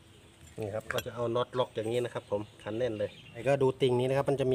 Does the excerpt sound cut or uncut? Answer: cut